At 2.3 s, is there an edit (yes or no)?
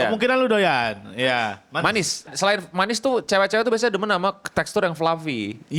yes